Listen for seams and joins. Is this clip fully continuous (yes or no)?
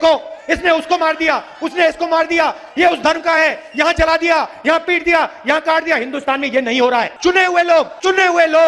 yes